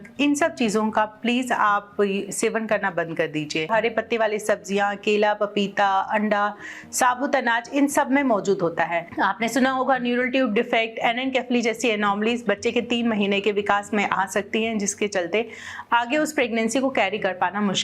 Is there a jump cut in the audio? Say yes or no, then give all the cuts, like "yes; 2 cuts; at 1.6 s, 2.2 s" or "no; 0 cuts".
yes; 2 cuts; at 3.7 s, 9.1 s